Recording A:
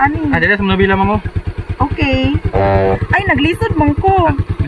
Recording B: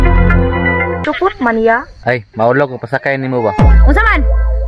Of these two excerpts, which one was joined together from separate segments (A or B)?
B